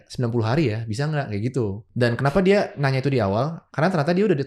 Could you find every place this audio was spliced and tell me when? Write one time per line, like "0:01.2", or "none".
0:01.8